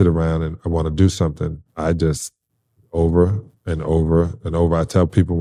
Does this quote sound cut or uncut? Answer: uncut